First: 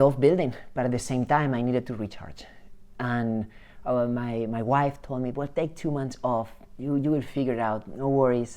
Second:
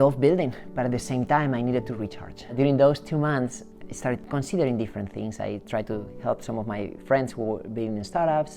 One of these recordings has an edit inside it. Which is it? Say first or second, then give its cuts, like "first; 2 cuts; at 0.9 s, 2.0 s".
second; 2 cuts; at 2.5 s, 3.7 s